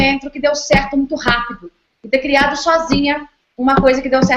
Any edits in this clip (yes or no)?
yes